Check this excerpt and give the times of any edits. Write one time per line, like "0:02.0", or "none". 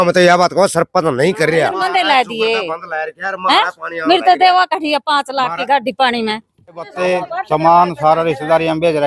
0:01.8
0:06.9